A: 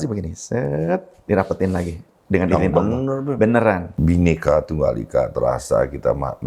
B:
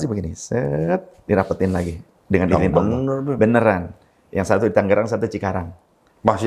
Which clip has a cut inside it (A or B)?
A